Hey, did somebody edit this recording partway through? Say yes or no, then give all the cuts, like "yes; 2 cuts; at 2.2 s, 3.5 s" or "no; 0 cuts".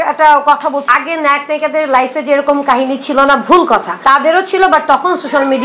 yes; 2 cuts; at 0.9 s, 3.9 s